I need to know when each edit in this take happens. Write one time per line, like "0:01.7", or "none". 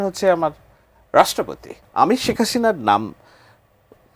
0:01.8